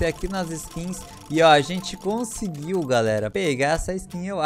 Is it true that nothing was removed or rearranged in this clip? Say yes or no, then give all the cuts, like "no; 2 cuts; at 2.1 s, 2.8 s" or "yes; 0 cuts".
no; 1 cut; at 3.3 s